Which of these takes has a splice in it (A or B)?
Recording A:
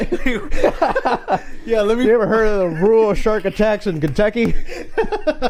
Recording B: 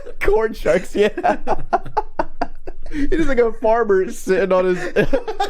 B